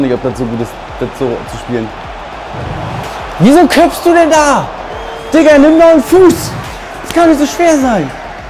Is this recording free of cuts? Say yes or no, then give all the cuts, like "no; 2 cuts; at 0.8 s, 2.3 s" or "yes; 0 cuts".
yes; 0 cuts